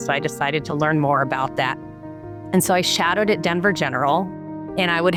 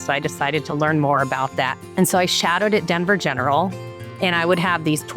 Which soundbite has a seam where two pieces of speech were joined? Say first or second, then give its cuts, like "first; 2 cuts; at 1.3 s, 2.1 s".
second; 1 cut; at 1.8 s